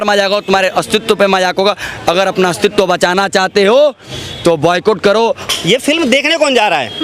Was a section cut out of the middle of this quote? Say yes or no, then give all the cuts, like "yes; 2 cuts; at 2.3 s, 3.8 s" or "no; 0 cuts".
yes; 1 cut; at 5.4 s